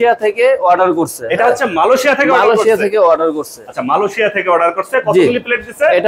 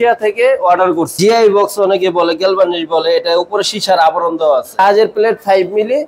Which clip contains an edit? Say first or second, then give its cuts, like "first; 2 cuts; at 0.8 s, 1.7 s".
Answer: second; 2 cuts; at 1.2 s, 4.8 s